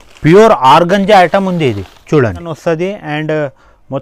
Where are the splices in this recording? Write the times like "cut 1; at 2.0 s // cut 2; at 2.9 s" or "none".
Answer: cut 1; at 2.5 s